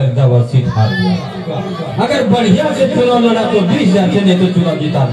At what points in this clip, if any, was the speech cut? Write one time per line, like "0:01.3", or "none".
0:01.4